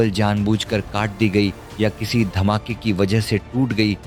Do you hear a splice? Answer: no; 0 cuts

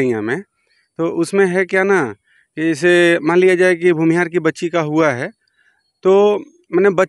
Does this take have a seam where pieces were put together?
no; 0 cuts

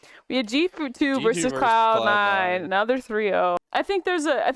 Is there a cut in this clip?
yes; 1 cut; at 3.6 s

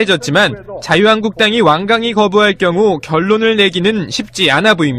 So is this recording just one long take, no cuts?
yes; 0 cuts

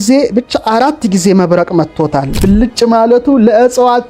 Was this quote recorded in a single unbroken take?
no; 1 cut; at 2.3 s

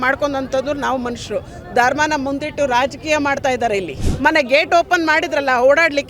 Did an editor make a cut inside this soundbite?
yes; 1 cut; at 4.1 s

